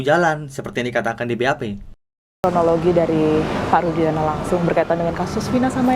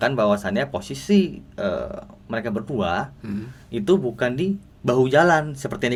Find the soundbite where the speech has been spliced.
first; 1 cut; at 2.2 s

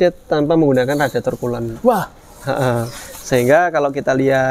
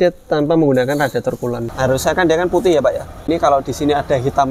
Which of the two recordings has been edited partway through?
second; 2 cuts; at 1.7 s, 3.2 s

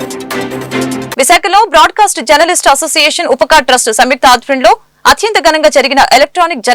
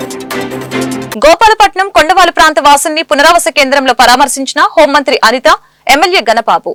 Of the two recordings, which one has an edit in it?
first; 1 cut; at 1.1 s

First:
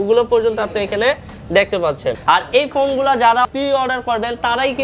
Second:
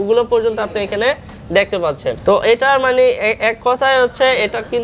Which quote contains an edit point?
first; 2 cuts; at 2.2 s, 3.5 s

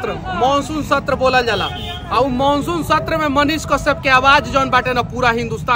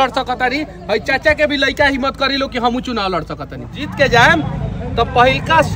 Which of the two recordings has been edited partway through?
second; 1 cut; at 3.9 s

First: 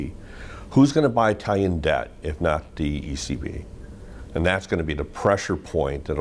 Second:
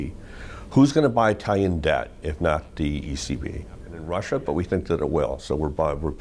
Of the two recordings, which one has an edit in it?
second; 1 cut; at 3.9 s

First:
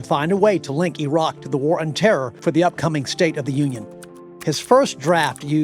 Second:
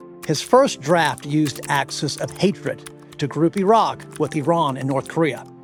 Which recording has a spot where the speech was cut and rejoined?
first; 1 cut; at 2.3 s

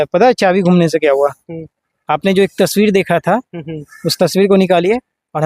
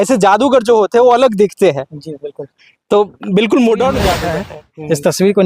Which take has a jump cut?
second; 1 cut; at 4.3 s

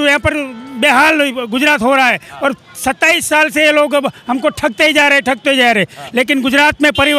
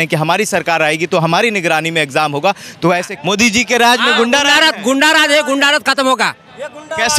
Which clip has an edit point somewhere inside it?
second; 1 cut; at 3.1 s

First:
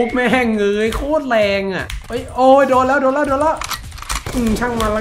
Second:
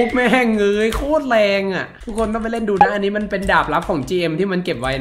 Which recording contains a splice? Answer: first; 1 cut; at 1.9 s

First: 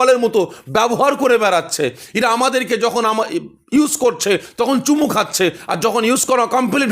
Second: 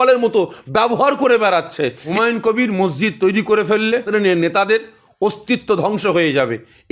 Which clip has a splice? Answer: second; 2 cuts; at 2.0 s, 4.1 s

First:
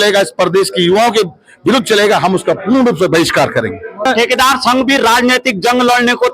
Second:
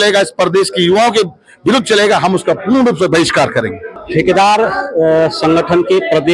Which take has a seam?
first; 1 cut; at 4.0 s

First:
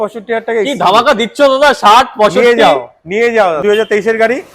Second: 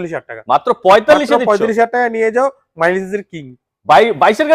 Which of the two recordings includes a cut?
first; 1 cut; at 3.6 s

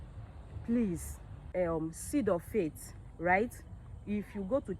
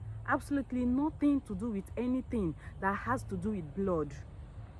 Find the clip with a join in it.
first; 1 cut; at 1.4 s

